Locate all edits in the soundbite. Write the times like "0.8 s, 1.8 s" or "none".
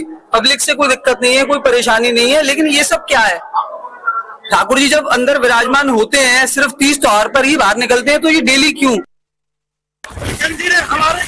4.9 s